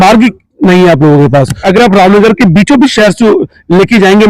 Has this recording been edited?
yes; 1 cut; at 1.6 s

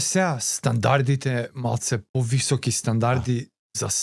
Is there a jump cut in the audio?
yes; 1 cut; at 2.1 s

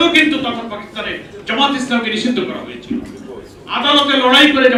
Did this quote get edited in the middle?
no; 0 cuts

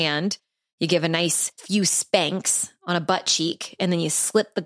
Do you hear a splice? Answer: yes; 1 cut; at 1.5 s

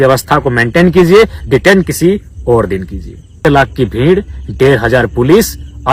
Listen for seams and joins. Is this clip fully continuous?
no; 1 cut; at 3.4 s

